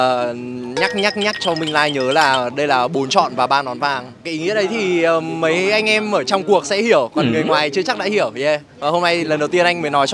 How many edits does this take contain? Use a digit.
0